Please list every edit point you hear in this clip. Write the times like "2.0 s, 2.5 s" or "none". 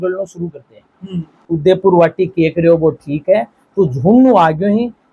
1.5 s